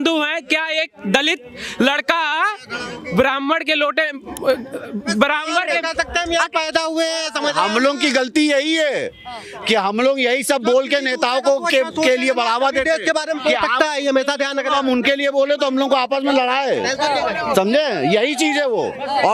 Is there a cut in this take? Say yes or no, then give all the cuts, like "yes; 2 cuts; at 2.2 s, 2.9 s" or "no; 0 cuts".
no; 0 cuts